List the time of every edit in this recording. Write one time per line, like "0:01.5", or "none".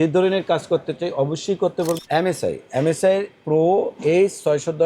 0:02.0